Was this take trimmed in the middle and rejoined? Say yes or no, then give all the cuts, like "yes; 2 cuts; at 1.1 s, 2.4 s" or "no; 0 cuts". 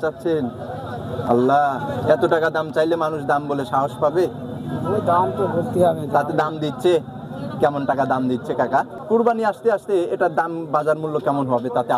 yes; 1 cut; at 9.0 s